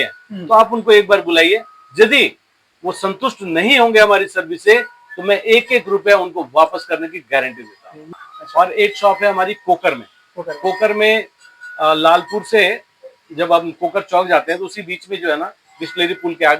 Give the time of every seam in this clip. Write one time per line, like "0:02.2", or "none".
0:08.1